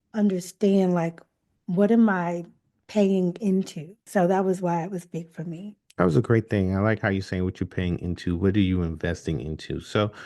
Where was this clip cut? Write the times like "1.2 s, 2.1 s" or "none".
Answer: 4.0 s